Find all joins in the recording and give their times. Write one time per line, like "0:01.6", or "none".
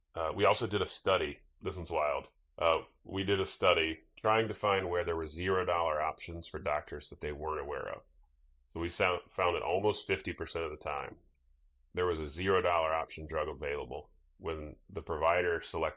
0:01.5
0:02.4
0:04.1